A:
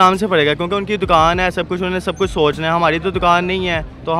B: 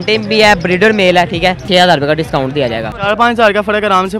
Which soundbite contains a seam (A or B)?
B